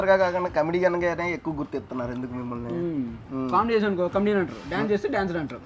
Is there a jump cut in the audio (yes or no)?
yes